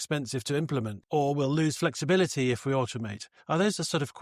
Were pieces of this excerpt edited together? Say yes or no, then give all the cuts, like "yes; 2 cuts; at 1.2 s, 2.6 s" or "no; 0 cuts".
yes; 1 cut; at 1.0 s